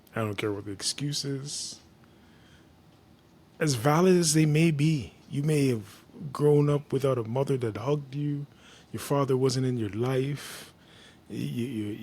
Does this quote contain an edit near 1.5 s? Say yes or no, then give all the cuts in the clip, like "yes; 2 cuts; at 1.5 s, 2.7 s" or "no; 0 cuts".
no; 0 cuts